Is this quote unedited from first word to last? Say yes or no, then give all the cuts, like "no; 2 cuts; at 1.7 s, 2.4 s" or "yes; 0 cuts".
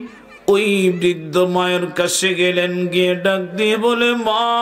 yes; 0 cuts